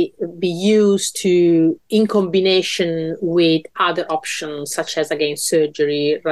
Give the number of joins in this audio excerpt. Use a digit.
0